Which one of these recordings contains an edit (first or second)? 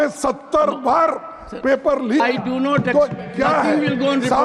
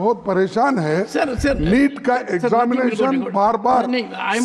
first